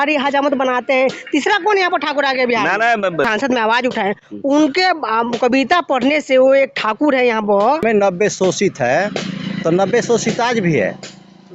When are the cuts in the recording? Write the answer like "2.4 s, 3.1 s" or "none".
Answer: 3.3 s, 7.8 s